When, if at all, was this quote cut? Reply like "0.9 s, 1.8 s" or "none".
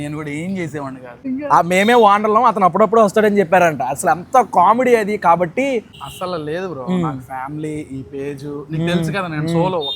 1.2 s, 5.9 s